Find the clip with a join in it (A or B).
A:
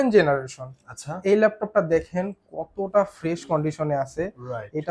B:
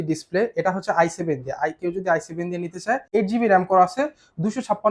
B